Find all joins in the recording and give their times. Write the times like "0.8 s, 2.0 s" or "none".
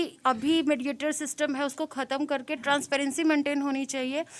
none